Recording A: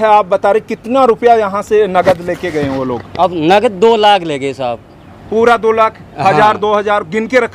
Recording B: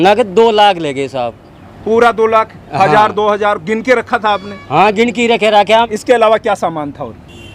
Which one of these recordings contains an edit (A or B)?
B